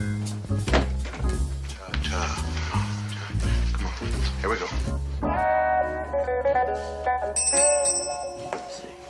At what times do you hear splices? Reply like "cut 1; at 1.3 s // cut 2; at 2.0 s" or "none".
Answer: cut 1; at 8.1 s